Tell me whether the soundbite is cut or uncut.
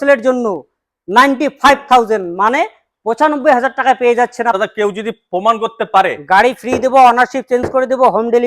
cut